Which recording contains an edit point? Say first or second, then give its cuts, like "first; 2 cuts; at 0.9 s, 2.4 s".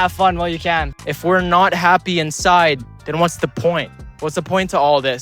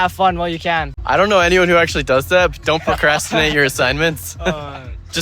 first; 1 cut; at 0.9 s